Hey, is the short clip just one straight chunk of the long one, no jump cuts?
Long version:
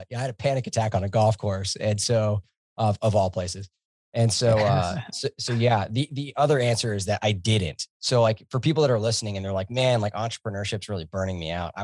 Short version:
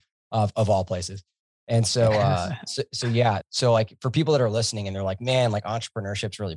no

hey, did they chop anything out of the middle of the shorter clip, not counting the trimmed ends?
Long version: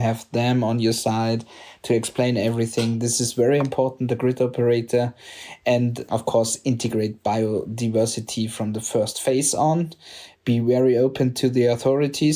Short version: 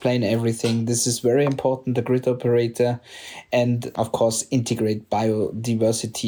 no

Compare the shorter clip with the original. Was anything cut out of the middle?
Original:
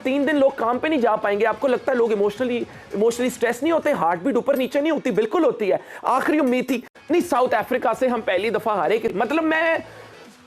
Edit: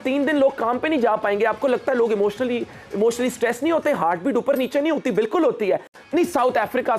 yes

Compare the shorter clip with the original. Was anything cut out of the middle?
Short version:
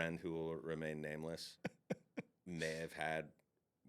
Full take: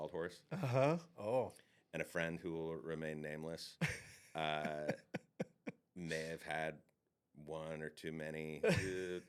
yes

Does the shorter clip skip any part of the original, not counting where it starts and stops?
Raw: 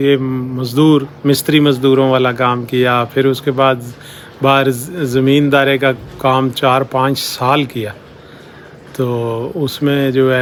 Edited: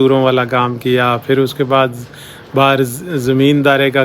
no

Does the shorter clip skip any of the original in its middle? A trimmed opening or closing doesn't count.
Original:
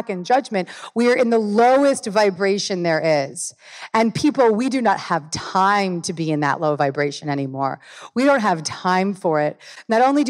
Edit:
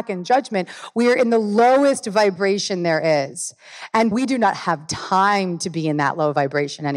yes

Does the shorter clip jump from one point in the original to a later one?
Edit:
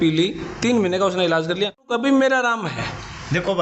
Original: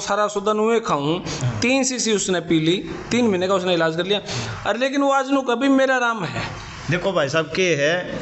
yes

